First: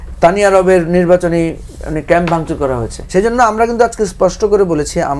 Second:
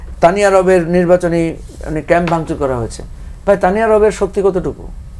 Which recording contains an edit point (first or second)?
first